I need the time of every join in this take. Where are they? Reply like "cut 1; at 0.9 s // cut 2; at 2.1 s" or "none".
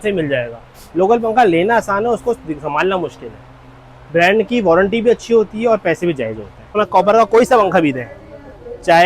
cut 1; at 6.7 s